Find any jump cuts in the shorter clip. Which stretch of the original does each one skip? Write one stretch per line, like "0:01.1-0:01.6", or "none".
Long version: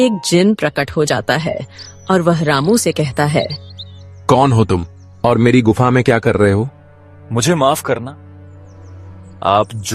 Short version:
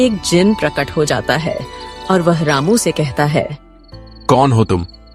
none